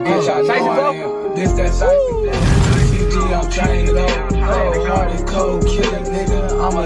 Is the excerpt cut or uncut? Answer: uncut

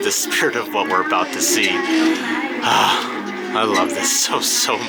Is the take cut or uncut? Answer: uncut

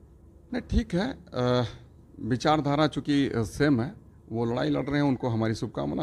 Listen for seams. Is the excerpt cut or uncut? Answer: uncut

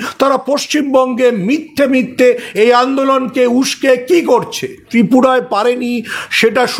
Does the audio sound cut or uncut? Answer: cut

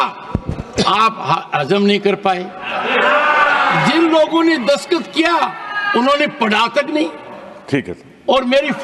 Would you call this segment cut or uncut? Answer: cut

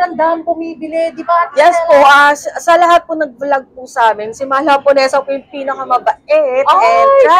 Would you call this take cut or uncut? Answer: uncut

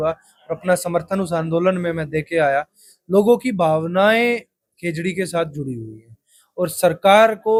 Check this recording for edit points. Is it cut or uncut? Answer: uncut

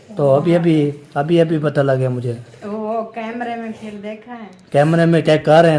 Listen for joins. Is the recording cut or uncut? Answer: uncut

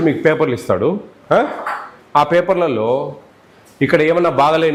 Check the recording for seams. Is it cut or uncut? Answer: uncut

